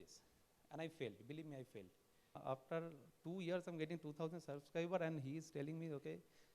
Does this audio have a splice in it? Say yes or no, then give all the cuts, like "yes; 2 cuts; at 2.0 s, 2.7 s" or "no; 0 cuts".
yes; 1 cut; at 2.4 s